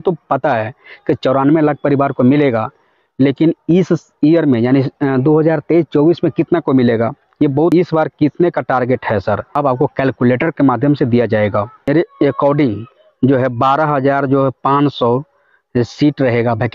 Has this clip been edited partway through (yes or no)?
yes